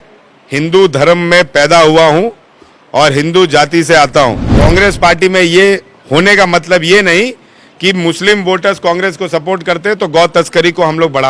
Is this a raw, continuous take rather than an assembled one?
no; 1 cut; at 4.5 s

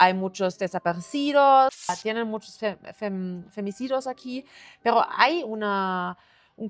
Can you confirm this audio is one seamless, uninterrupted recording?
no; 1 cut; at 1.9 s

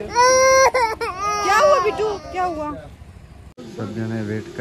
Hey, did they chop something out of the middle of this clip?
yes; 1 cut; at 3.7 s

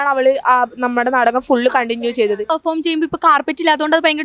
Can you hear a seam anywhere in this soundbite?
yes; 1 cut; at 2.5 s

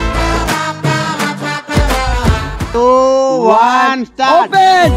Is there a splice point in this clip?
yes; 1 cut; at 2.7 s

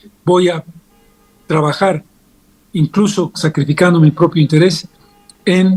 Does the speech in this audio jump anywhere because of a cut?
no; 0 cuts

